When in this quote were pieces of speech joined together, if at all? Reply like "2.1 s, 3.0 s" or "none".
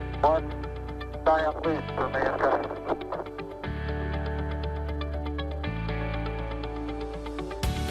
6.1 s